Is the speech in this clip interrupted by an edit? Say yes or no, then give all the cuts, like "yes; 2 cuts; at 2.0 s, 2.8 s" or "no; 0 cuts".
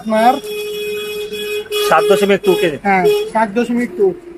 no; 0 cuts